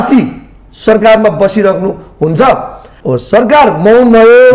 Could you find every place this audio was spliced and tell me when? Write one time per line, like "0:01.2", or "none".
0:02.9